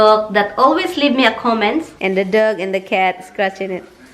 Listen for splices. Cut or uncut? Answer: cut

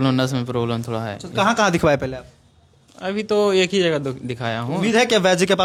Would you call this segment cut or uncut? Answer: uncut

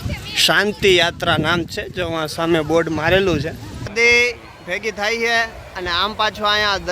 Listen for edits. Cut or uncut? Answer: cut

